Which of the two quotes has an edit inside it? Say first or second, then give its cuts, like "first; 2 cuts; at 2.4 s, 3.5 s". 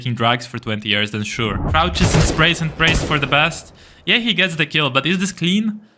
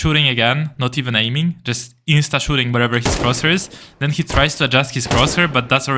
first; 1 cut; at 1.6 s